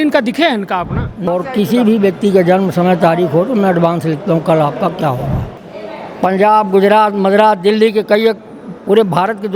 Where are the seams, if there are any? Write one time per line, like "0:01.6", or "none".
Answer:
0:01.3
0:05.6